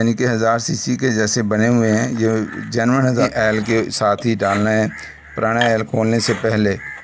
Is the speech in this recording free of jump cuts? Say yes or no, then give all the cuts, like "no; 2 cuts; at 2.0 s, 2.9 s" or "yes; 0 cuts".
no; 1 cut; at 3.3 s